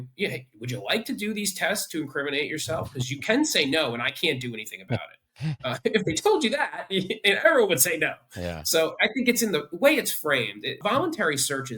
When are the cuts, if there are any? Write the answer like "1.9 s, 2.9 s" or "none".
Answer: 10.8 s